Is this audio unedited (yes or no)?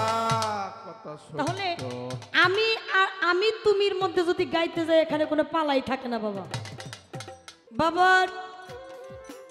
no